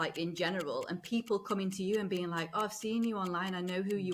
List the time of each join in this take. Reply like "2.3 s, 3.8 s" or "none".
none